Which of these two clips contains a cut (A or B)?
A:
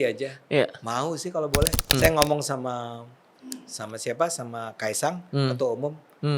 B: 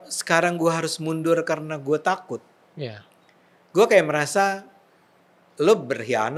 A